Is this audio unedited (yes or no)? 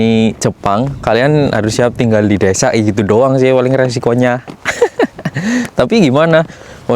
yes